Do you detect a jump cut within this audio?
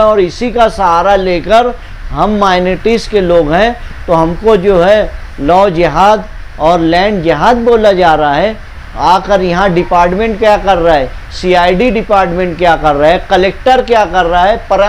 no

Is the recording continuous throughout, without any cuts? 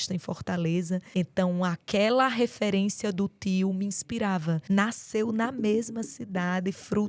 no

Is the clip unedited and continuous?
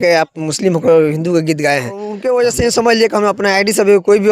no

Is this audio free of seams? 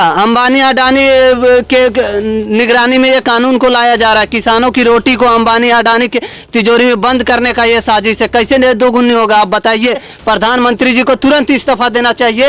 no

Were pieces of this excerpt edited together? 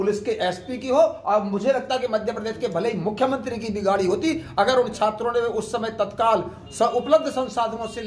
no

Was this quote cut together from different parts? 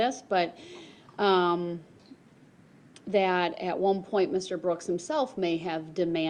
no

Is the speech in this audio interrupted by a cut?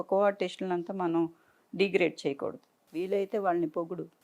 no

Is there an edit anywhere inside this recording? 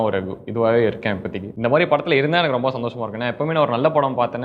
yes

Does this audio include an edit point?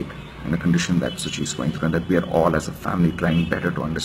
no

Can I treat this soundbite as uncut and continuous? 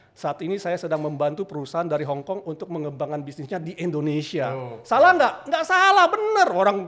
yes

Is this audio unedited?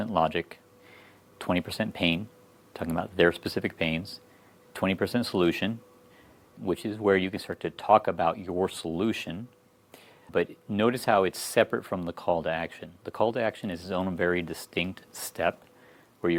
yes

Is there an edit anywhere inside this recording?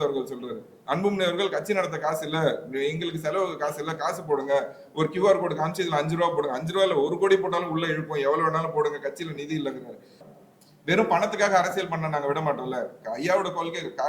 yes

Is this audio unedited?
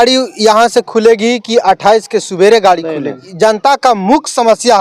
no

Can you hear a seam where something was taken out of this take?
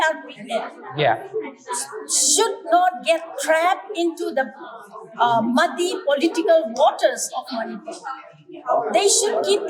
no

